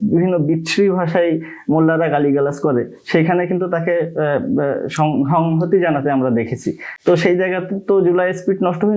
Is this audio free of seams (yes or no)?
yes